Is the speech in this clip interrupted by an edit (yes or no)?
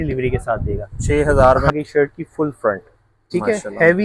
yes